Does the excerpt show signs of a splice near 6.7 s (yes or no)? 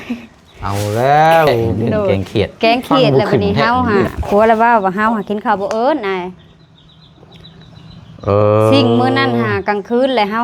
no